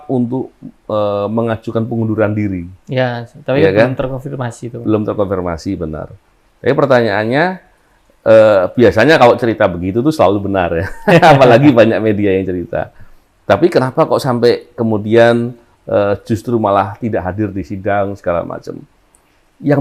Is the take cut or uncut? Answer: uncut